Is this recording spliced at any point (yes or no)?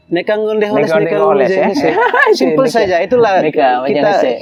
no